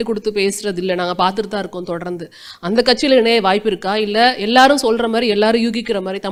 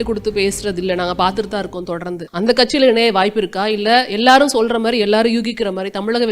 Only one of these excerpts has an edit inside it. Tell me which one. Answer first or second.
second